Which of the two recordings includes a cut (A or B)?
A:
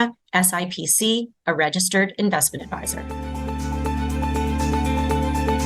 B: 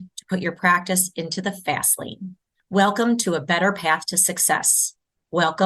A